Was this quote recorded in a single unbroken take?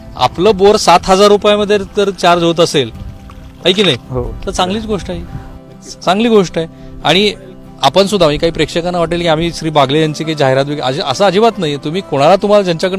yes; 0 cuts

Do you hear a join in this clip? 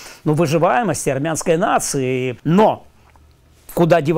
yes; 1 cut; at 2.3 s

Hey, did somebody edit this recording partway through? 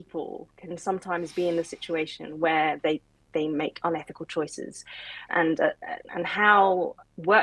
yes; 1 cut; at 5.3 s

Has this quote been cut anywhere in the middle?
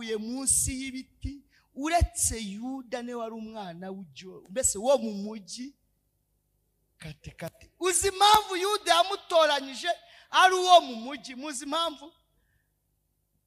no; 0 cuts

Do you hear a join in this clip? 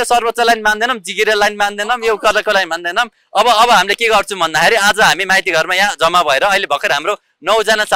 no; 0 cuts

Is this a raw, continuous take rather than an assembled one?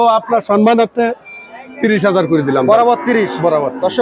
yes; 0 cuts

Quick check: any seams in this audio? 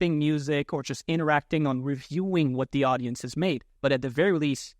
yes; 1 cut; at 3.7 s

